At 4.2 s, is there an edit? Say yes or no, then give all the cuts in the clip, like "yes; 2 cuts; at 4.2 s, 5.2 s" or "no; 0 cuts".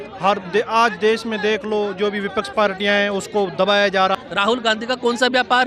yes; 1 cut; at 4.2 s